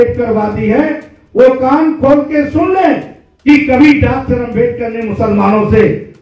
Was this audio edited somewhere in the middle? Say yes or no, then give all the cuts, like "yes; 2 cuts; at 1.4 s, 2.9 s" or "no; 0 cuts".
no; 0 cuts